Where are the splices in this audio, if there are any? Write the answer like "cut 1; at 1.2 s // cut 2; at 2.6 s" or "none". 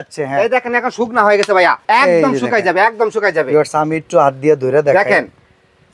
cut 1; at 1.8 s

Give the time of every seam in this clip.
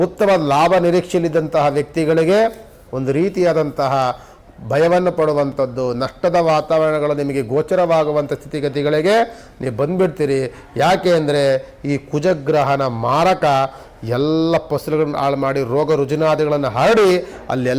none

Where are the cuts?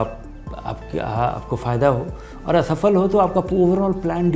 none

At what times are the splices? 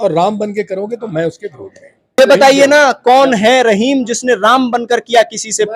cut 1; at 2.2 s

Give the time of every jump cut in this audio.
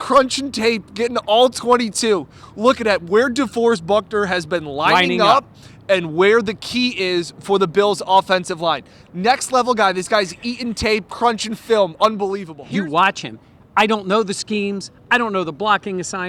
cut 1; at 12.5 s

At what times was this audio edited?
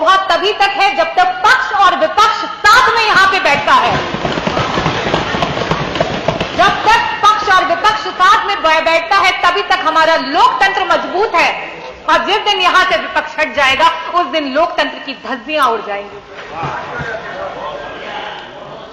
none

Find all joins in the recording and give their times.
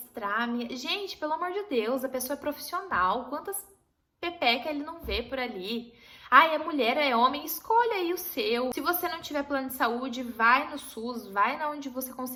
none

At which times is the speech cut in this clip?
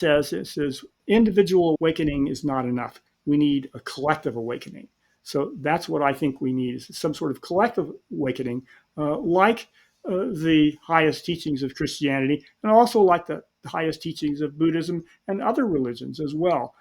cut 1; at 0.9 s // cut 2; at 1.8 s

